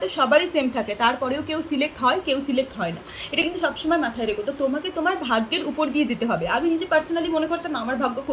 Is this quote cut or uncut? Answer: uncut